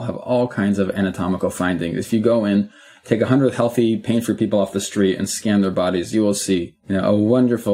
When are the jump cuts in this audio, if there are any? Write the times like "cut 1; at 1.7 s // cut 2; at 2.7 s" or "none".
none